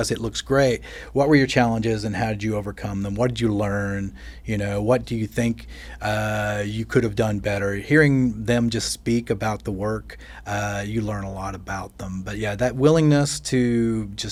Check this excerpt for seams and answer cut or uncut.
uncut